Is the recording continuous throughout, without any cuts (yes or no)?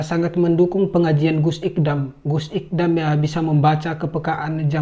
yes